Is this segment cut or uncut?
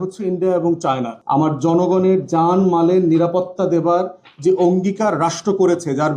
cut